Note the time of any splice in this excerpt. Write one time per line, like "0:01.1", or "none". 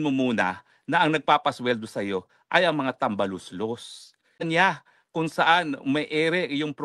0:04.4